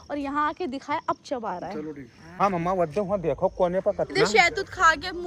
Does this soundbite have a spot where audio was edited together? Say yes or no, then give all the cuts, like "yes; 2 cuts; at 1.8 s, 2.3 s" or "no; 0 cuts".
yes; 1 cut; at 2.2 s